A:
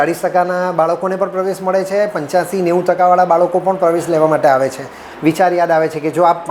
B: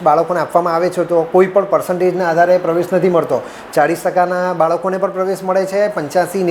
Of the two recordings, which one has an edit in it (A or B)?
A